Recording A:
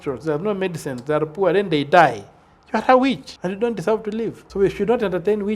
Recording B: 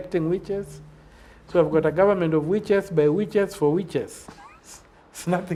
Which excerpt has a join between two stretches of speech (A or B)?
A